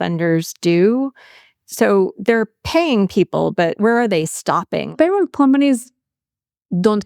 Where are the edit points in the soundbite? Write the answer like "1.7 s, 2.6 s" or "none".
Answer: 4.9 s